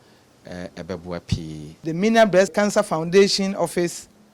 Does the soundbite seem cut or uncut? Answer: cut